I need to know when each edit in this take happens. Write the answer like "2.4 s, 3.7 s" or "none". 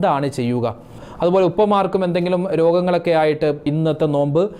0.9 s, 3.7 s